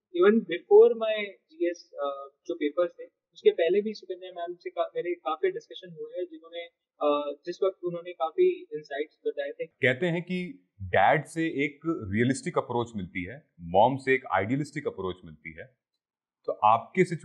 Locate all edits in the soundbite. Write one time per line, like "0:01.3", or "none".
0:09.7